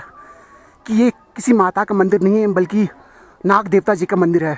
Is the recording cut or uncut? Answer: uncut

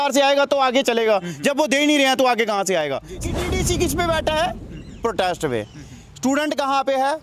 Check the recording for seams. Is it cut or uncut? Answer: cut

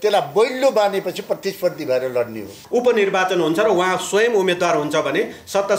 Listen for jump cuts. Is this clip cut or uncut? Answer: cut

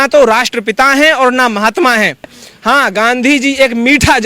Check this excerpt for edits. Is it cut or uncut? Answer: cut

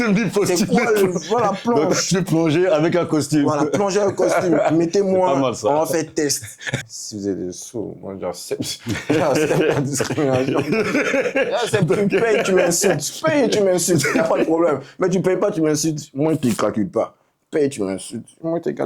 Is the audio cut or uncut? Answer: cut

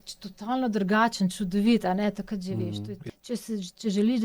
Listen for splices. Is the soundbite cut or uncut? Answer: cut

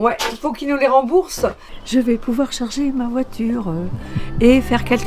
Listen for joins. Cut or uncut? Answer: cut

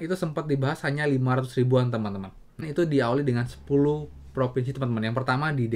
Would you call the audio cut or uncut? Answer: cut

